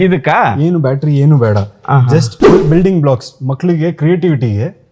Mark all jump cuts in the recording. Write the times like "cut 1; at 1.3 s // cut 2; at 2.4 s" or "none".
cut 1; at 2.6 s